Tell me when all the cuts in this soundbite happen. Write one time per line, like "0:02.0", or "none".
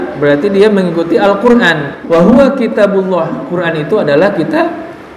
0:01.9